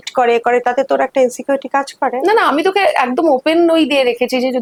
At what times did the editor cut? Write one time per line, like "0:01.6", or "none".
none